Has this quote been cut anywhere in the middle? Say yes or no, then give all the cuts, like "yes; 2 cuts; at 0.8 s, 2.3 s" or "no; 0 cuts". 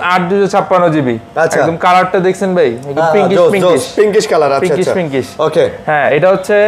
no; 0 cuts